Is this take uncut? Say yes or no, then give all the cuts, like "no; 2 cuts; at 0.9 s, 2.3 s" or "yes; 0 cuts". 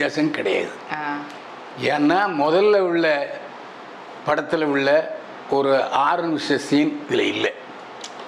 yes; 0 cuts